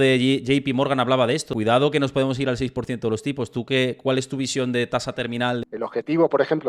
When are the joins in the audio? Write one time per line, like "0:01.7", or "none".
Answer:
0:01.5
0:05.6